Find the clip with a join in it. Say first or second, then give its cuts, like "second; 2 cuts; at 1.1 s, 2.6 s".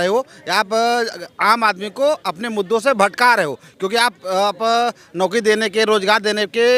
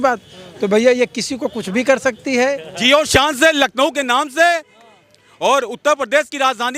second; 1 cut; at 2.7 s